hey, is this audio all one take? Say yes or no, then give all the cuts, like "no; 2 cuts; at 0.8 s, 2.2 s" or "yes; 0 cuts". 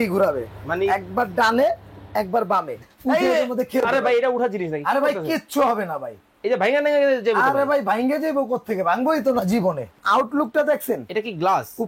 no; 2 cuts; at 2.8 s, 10.0 s